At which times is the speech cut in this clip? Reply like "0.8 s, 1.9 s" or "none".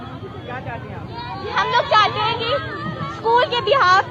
none